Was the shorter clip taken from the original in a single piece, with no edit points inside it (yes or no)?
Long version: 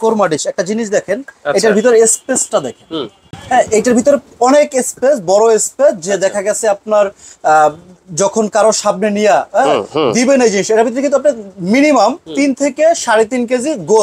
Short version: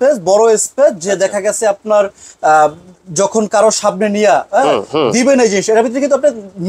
yes